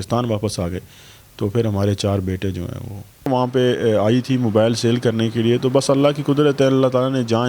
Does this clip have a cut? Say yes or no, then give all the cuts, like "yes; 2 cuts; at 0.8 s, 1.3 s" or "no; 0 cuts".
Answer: yes; 1 cut; at 3.3 s